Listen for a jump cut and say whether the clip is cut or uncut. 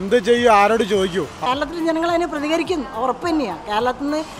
cut